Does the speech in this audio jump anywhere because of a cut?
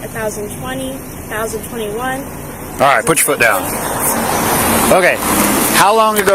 no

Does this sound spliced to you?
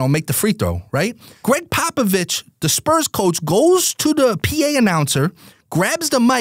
yes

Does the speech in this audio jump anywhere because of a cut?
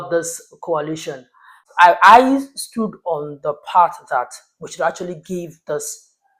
yes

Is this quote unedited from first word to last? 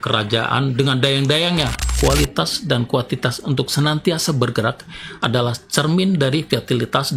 no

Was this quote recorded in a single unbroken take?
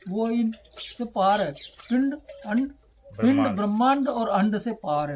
yes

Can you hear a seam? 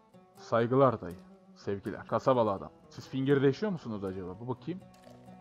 yes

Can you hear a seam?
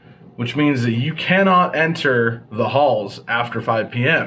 no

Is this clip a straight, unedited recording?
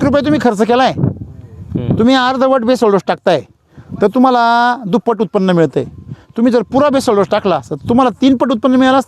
yes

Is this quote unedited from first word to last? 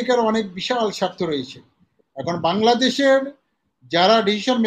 yes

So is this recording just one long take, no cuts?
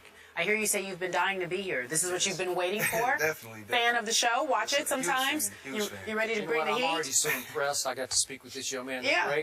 no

